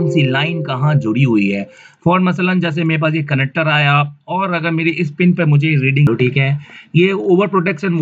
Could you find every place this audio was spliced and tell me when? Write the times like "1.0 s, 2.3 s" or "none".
6.1 s